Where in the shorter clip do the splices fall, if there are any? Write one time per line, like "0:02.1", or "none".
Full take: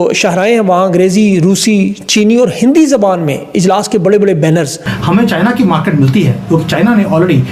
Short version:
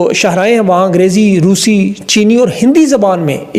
none